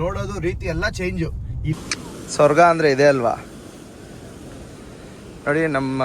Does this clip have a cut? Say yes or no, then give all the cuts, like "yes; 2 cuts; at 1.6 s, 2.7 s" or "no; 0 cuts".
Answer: yes; 1 cut; at 1.7 s